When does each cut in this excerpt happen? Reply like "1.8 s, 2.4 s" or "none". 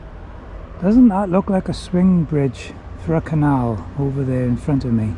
none